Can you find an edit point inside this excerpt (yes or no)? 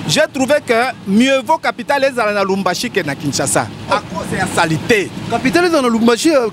no